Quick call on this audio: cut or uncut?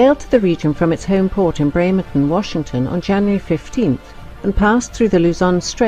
cut